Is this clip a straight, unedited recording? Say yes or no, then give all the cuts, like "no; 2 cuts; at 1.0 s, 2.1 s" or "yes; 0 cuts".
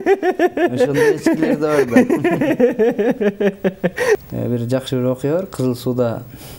no; 1 cut; at 4.2 s